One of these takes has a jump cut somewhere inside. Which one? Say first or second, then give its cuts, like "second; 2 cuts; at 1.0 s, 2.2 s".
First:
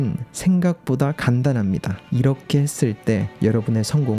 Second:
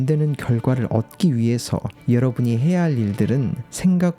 first; 1 cut; at 2.1 s